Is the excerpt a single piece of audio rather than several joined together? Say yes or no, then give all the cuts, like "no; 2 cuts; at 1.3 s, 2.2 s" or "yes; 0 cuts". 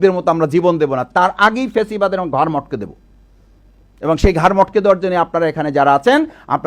yes; 0 cuts